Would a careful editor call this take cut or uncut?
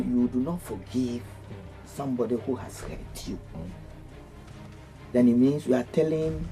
uncut